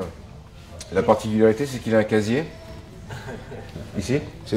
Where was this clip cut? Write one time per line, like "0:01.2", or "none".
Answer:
none